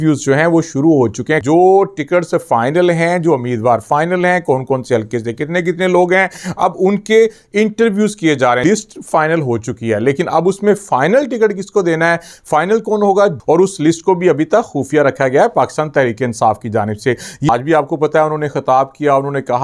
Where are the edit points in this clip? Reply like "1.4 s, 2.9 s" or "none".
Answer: 1.4 s, 8.6 s, 13.4 s, 17.5 s